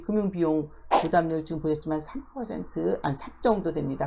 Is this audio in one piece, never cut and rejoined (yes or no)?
yes